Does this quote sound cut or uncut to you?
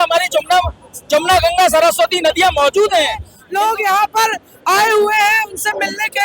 cut